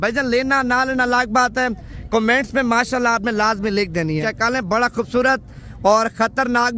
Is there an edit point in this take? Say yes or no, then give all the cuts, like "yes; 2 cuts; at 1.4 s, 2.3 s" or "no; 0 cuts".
yes; 1 cut; at 4.3 s